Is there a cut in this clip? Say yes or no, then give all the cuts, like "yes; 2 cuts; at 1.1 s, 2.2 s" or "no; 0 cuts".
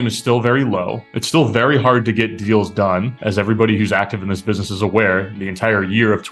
no; 0 cuts